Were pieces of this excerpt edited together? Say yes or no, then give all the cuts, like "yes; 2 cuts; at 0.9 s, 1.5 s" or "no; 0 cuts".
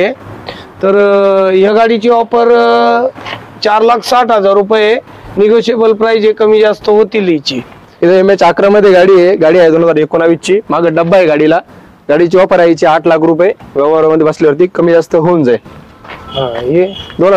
no; 0 cuts